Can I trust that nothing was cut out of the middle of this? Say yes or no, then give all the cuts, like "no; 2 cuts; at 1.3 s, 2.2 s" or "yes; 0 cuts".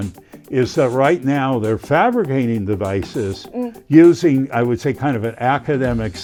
yes; 0 cuts